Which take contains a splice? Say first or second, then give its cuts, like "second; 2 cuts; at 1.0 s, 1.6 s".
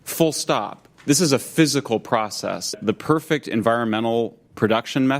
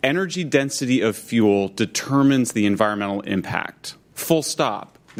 first; 1 cut; at 2.7 s